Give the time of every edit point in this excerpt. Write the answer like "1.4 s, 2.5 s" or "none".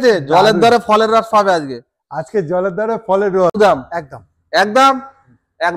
3.6 s